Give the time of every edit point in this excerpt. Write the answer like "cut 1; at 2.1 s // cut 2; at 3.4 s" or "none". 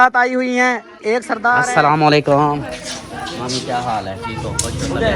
cut 1; at 1.6 s